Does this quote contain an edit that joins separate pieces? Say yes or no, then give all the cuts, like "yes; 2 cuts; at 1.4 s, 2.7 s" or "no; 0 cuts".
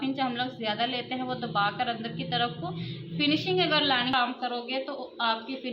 yes; 1 cut; at 4.1 s